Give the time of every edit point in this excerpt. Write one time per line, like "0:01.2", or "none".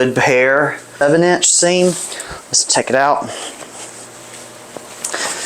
0:01.0